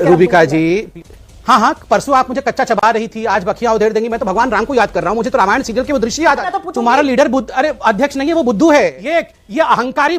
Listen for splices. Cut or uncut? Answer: cut